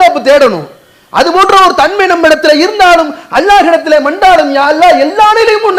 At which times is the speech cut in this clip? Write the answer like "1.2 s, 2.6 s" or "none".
none